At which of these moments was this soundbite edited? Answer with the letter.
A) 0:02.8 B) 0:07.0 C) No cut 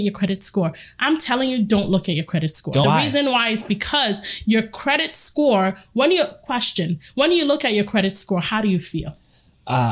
A